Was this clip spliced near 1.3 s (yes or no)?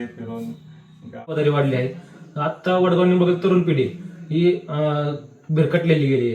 yes